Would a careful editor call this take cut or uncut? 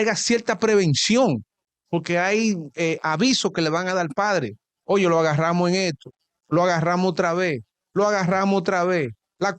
uncut